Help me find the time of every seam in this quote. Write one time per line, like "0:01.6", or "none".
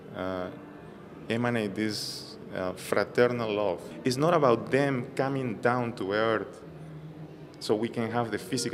0:03.9